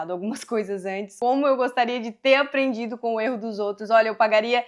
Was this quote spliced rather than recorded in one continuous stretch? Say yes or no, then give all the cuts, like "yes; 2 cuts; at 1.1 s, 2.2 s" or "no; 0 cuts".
yes; 1 cut; at 1.1 s